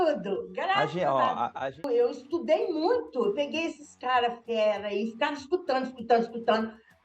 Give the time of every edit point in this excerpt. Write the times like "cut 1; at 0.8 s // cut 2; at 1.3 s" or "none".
cut 1; at 1.8 s